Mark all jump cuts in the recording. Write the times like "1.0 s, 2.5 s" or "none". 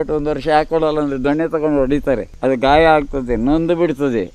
2.3 s

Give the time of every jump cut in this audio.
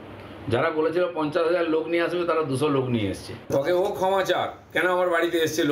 3.3 s

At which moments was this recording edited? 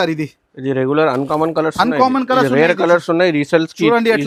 none

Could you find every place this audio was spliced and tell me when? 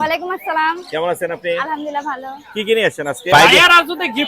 3.3 s

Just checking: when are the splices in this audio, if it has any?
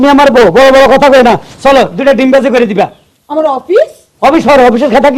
none

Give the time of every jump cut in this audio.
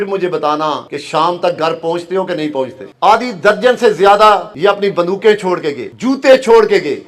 0.9 s, 2.9 s, 4.5 s

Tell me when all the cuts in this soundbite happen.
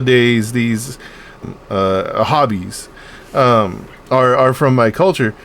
1.4 s

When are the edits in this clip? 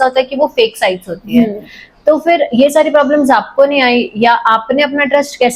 none

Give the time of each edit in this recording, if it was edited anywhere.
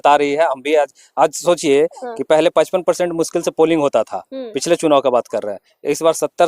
none

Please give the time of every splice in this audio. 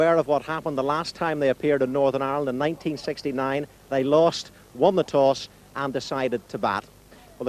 1.9 s

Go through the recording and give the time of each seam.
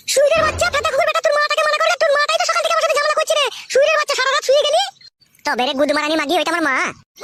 none

